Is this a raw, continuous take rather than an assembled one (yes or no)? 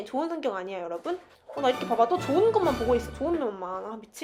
yes